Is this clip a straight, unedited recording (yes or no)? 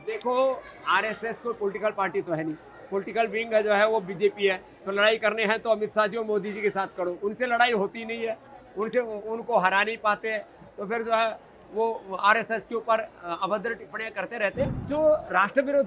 no